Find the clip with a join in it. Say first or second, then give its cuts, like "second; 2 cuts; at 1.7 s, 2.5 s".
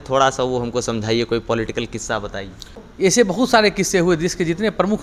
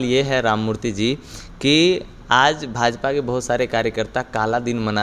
first; 1 cut; at 2.9 s